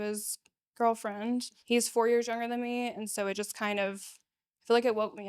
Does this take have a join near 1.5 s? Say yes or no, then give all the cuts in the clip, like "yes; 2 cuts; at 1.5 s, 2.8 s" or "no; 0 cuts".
yes; 1 cut; at 1.5 s